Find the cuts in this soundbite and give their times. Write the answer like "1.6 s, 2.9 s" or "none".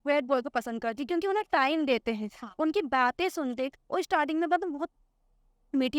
none